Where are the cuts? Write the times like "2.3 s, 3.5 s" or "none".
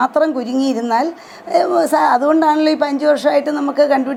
none